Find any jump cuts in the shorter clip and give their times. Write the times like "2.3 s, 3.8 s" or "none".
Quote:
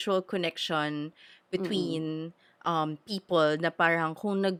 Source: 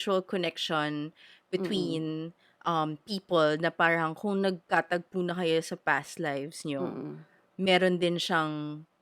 none